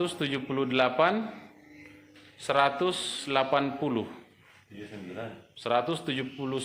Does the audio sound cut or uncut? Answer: uncut